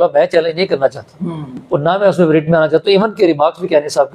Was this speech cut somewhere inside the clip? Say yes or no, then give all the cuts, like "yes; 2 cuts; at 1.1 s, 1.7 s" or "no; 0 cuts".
no; 0 cuts